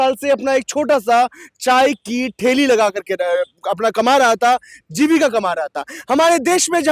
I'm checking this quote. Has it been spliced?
no; 0 cuts

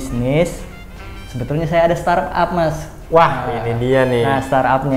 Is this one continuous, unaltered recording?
yes; 0 cuts

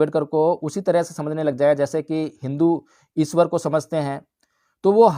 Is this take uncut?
yes; 0 cuts

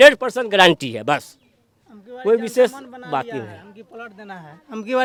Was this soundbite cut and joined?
no; 0 cuts

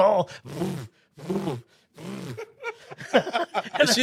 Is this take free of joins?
yes; 0 cuts

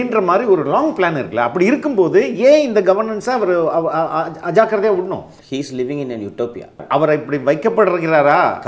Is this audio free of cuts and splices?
no; 2 cuts; at 5.3 s, 6.8 s

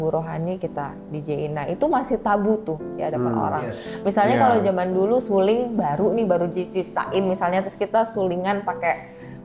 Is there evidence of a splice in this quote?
no; 0 cuts

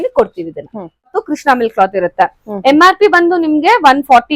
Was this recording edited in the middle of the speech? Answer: yes; 1 cut; at 1.1 s

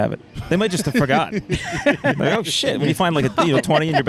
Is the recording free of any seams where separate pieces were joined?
yes; 0 cuts

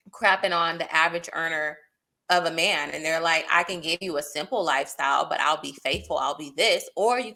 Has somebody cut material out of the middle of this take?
no; 0 cuts

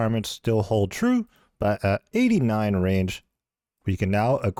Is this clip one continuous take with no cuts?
yes; 0 cuts

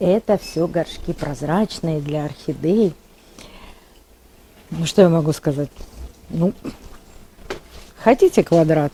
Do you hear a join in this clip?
no; 0 cuts

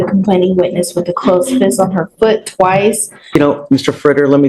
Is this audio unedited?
no; 1 cut; at 3.3 s

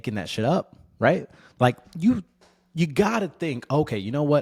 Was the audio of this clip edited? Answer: no; 0 cuts

